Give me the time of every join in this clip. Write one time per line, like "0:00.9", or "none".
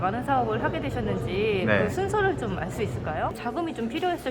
0:03.3

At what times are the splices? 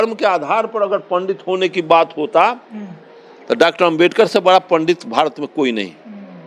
none

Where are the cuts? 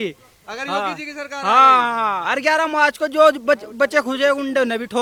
none

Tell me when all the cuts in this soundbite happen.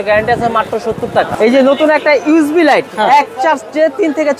0:01.3

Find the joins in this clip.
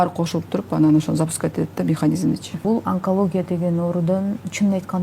0:02.6

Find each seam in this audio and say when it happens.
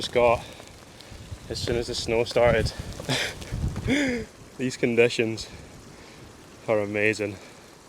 0:02.9

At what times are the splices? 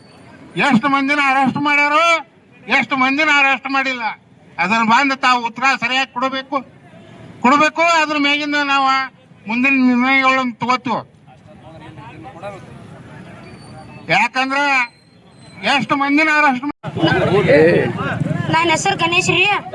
0:16.7

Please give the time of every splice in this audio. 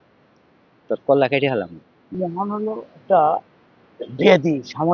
0:02.1

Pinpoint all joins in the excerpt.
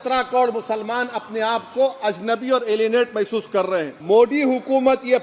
0:03.9

